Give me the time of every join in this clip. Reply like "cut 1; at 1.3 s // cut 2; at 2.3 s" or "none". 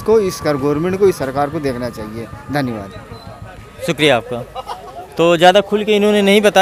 none